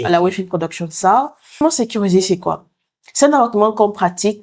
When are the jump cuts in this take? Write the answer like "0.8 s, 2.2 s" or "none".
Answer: 1.6 s

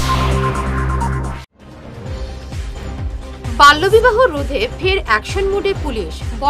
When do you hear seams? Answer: 1.4 s

